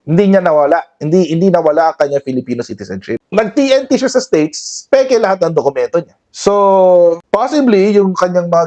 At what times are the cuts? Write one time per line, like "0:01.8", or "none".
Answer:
0:03.3